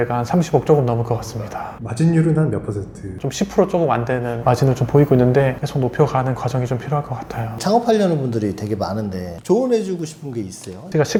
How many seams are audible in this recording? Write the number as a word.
zero